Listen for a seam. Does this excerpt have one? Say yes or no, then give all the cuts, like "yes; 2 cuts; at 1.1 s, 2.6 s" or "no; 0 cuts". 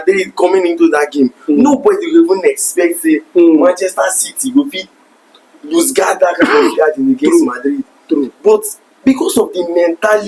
no; 0 cuts